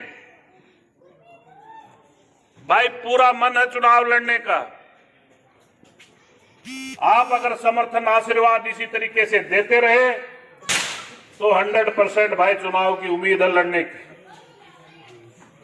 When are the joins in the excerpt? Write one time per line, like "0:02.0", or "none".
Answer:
none